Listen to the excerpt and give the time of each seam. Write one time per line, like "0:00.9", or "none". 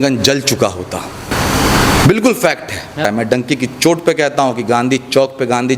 0:01.3
0:03.0